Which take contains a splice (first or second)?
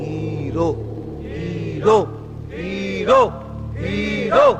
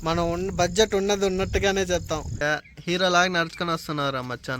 second